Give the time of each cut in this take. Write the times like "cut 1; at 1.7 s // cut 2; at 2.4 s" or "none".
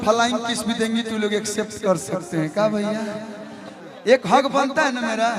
cut 1; at 3.7 s

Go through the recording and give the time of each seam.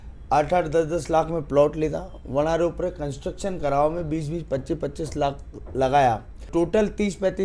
cut 1; at 6.5 s

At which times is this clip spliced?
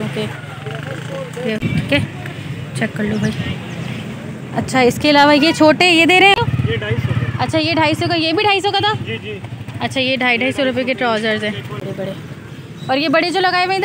cut 1; at 1.6 s // cut 2; at 6.4 s // cut 3; at 11.8 s

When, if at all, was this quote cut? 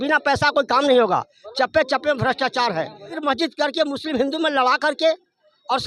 cut 1; at 3.2 s

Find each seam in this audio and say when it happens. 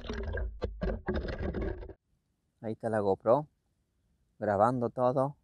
cut 1; at 1.8 s

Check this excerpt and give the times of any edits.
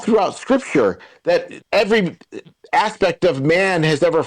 cut 1; at 1.5 s

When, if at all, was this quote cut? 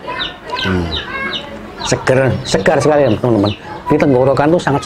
none

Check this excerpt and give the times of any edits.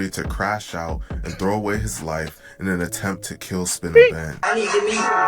cut 1; at 4.4 s

